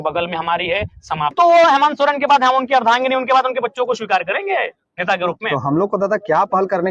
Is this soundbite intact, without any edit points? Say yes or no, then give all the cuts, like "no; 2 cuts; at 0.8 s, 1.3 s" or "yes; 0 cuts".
no; 1 cut; at 1.3 s